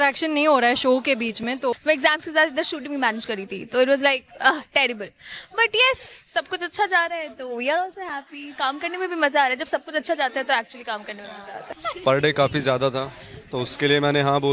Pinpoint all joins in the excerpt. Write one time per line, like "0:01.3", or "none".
0:01.7
0:11.6